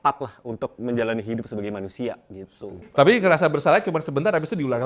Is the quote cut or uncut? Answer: cut